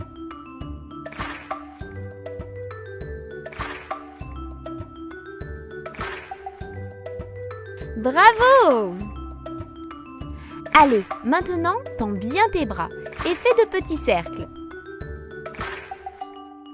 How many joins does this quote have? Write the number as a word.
three